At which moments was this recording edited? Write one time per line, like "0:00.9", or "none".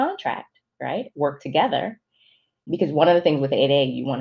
0:02.6